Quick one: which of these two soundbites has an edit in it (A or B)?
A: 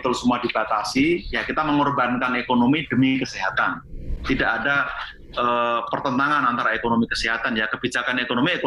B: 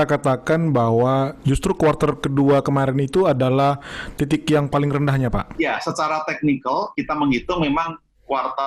B